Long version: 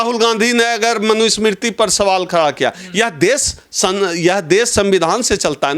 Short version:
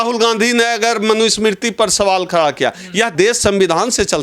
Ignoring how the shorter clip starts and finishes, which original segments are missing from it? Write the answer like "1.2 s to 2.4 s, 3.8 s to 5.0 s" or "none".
3.1 s to 4.4 s